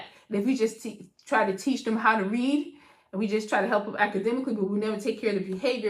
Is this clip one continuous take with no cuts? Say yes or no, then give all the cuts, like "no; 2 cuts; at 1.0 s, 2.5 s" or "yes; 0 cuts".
yes; 0 cuts